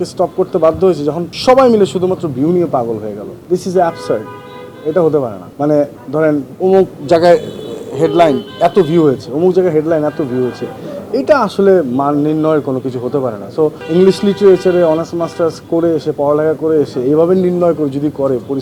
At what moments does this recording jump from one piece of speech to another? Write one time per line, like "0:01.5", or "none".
0:01.3
0:03.3
0:05.4
0:06.5
0:13.8